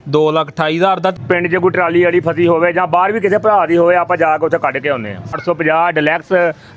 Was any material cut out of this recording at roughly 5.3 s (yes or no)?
yes